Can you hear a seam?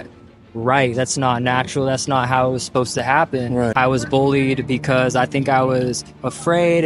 yes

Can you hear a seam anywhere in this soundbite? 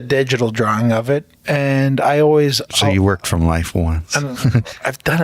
yes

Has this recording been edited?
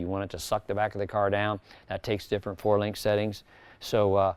no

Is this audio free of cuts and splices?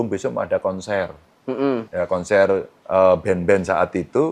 no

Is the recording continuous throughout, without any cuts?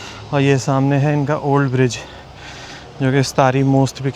yes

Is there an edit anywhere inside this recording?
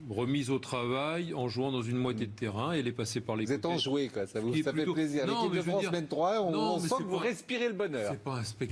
yes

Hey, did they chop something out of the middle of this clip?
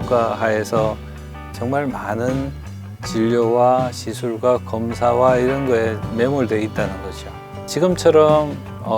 yes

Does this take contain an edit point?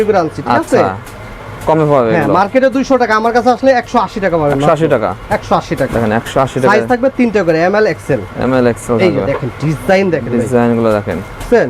no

